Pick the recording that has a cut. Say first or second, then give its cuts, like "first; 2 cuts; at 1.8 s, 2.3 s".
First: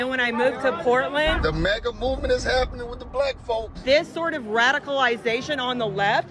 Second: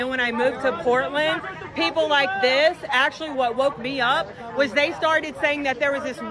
first; 2 cuts; at 1.4 s, 3.8 s